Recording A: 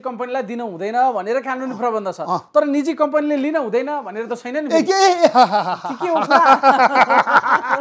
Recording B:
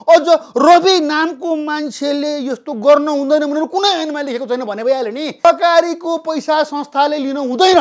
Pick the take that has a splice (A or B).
B